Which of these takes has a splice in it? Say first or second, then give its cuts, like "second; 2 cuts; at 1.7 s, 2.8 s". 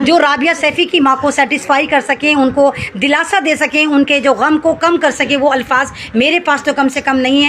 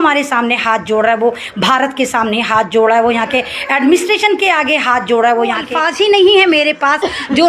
second; 1 cut; at 5.8 s